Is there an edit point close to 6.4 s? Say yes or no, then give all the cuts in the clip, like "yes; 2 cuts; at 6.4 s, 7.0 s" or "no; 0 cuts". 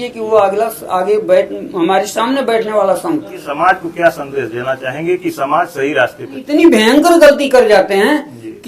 yes; 2 cuts; at 3.5 s, 6.4 s